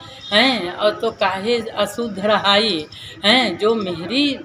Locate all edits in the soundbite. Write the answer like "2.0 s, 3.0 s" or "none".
none

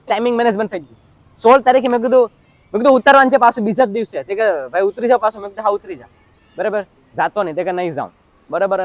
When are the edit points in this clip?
none

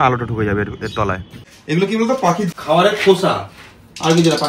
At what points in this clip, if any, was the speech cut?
1.3 s, 2.6 s

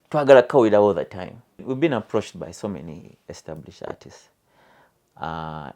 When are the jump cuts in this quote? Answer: 1.6 s

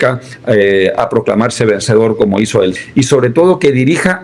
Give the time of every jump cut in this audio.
2.7 s

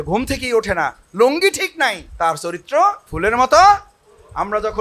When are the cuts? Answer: 2.0 s, 3.1 s

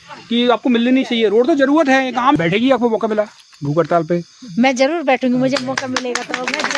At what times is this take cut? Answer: 2.4 s

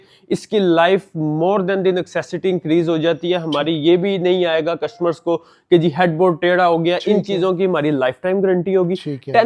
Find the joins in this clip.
none

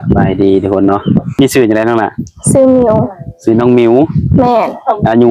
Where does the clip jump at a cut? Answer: 1.3 s

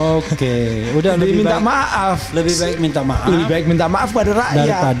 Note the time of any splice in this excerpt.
none

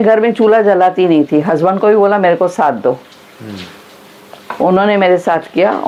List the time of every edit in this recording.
none

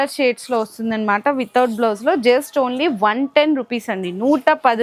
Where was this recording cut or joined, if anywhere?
none

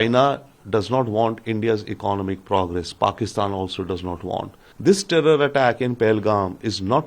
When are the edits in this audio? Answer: 4.6 s

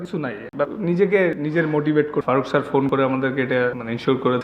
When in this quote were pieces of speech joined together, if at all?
2.2 s

